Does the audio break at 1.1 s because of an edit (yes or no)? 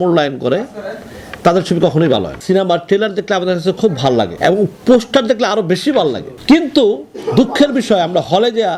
no